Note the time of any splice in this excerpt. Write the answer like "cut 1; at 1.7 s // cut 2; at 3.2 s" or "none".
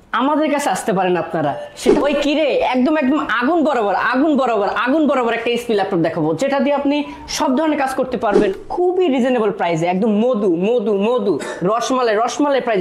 cut 1; at 2.0 s // cut 2; at 8.5 s

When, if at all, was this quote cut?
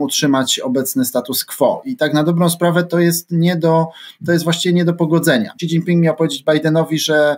cut 1; at 5.6 s

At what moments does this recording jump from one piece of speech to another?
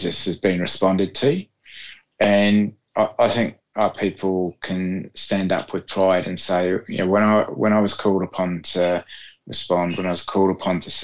none

